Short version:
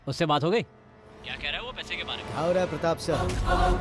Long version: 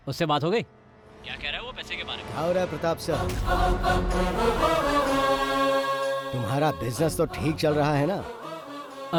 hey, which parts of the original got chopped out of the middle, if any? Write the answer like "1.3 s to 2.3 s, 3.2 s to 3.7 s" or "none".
none